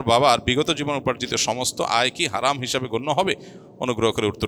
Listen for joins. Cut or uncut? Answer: uncut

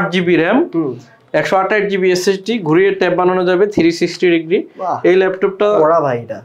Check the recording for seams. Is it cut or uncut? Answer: uncut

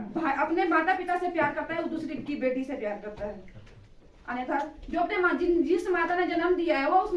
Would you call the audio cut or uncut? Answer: uncut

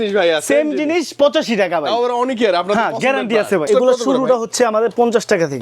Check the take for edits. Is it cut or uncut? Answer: cut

